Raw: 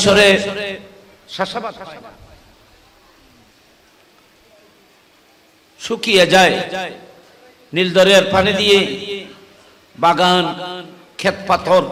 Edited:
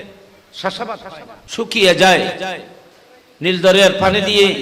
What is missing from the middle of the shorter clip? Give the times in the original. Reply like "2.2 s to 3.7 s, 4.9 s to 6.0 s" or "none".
2.1 s to 5.6 s